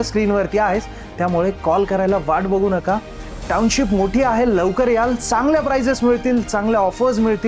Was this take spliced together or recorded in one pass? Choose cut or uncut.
uncut